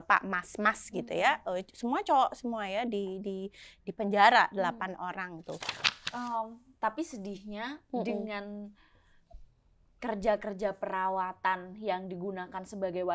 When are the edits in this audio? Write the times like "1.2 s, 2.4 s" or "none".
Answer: 5.8 s